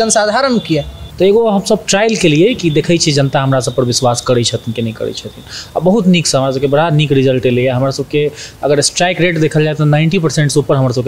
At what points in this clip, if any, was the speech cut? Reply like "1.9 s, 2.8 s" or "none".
1.0 s